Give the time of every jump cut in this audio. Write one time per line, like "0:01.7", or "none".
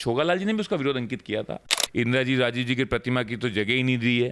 0:01.7